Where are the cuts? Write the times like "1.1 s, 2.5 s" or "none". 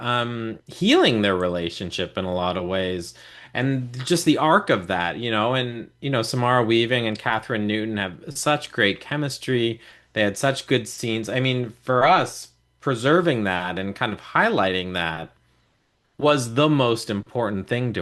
none